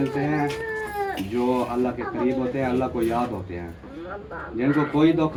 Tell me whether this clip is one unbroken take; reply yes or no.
yes